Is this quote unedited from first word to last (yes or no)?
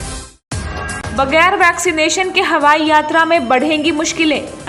no